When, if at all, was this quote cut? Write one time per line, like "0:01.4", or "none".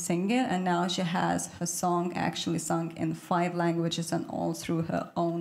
none